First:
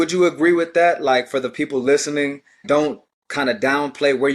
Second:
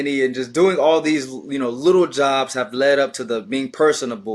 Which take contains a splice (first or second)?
first